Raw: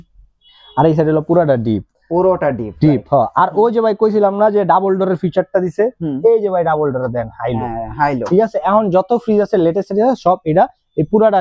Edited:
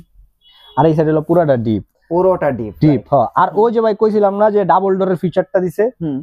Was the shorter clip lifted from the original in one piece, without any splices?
yes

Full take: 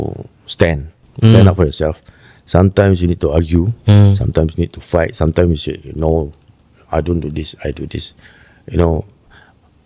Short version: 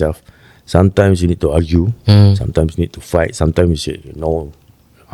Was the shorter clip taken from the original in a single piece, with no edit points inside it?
yes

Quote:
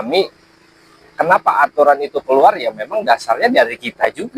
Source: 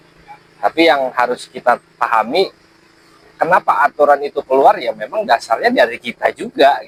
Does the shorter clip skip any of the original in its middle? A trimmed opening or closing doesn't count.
no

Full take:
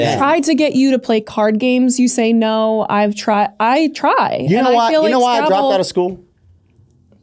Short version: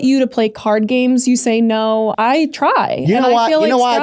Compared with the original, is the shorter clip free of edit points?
no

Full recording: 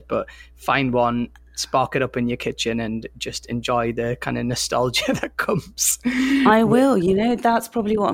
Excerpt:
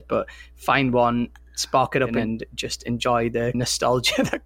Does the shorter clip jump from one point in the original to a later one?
yes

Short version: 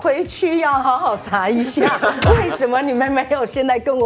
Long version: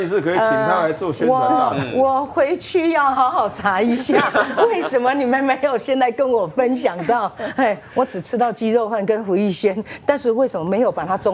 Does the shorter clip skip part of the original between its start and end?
no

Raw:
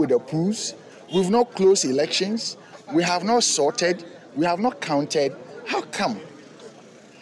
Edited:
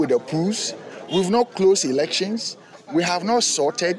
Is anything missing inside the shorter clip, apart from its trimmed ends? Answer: no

